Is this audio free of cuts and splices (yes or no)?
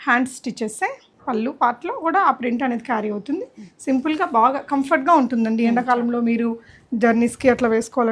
no